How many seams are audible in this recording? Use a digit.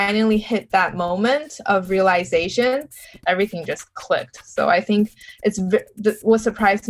1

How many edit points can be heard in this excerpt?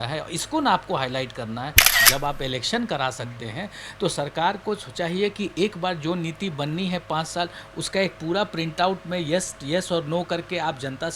1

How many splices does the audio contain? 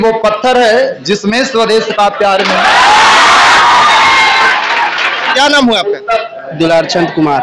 1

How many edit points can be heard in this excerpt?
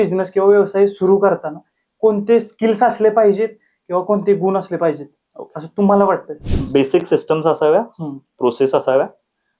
1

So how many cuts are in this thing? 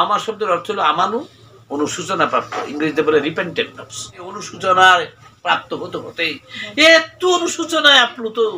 1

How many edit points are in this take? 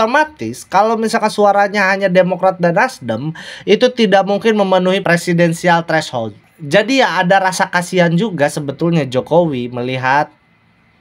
0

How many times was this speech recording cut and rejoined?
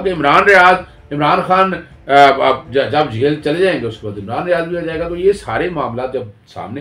0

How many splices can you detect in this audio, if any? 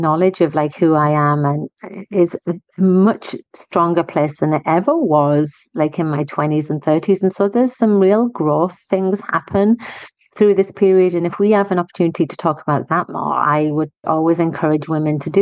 1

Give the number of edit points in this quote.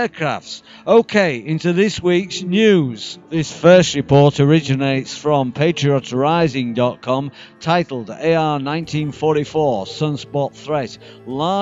0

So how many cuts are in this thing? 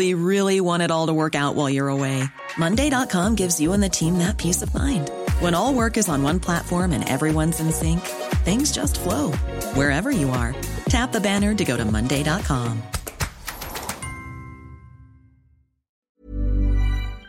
1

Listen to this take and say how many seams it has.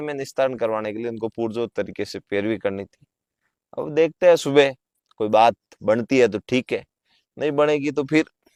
0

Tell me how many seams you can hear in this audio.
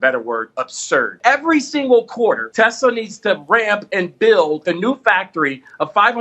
3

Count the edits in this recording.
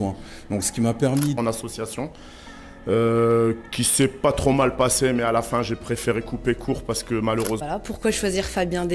2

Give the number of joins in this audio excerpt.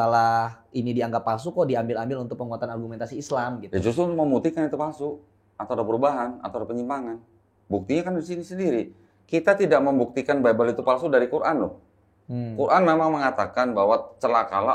0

